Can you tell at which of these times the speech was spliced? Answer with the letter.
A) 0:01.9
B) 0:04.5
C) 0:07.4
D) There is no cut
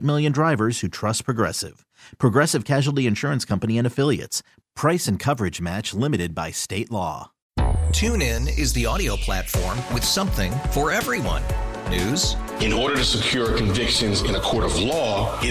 C